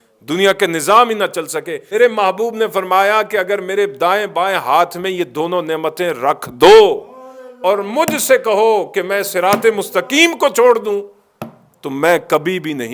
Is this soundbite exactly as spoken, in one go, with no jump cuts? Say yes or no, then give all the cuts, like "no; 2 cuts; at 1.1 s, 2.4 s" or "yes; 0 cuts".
no; 1 cut; at 1.8 s